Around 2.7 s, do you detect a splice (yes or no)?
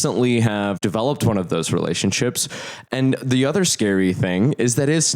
yes